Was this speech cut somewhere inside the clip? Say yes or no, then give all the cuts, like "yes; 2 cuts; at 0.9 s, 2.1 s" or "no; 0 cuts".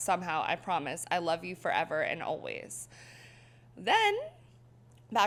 no; 0 cuts